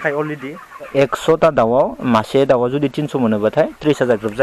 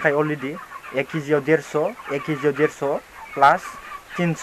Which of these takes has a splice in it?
first; 1 cut; at 0.9 s

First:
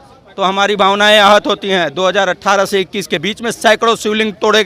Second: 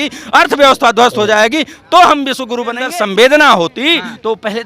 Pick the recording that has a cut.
second; 1 cut; at 2.9 s

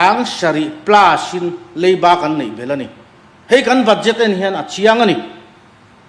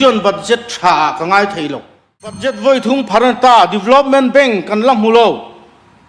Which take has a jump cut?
second; 1 cut; at 2.6 s

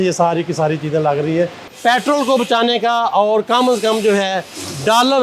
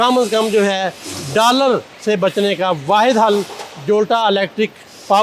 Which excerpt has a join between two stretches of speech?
first; 1 cut; at 1.6 s

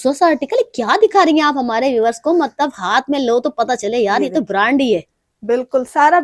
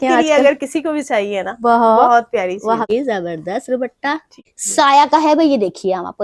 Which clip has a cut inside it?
second; 2 cuts; at 2.9 s, 4.6 s

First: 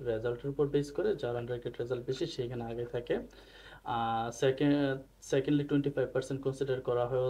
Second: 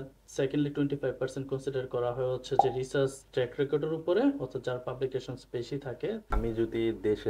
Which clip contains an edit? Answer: second; 1 cut; at 6.3 s

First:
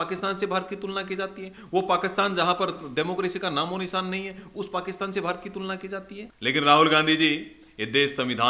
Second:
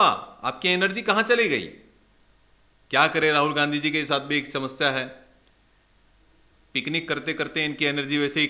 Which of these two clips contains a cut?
first; 1 cut; at 6.2 s

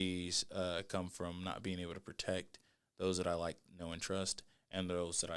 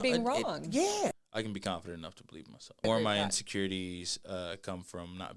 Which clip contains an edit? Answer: second; 2 cuts; at 1.1 s, 2.8 s

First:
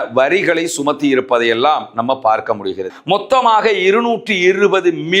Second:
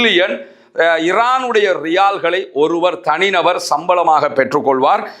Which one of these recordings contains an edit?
first; 1 cut; at 2.9 s

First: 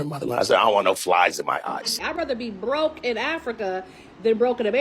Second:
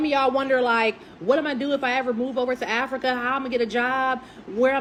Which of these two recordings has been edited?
first; 1 cut; at 2.0 s

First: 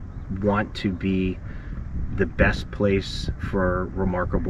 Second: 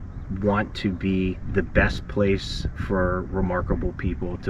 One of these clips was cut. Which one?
second; 1 cut; at 1.4 s

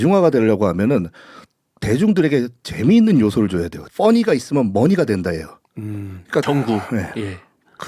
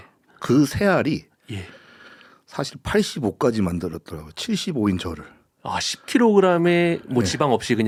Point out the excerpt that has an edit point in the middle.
first; 2 cuts; at 3.8 s, 6.4 s

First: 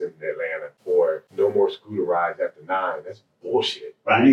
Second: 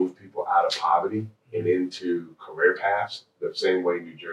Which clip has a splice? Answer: first; 1 cut; at 1.0 s

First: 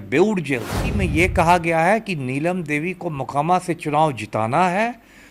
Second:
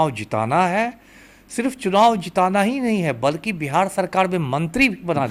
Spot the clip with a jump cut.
first; 1 cut; at 0.9 s

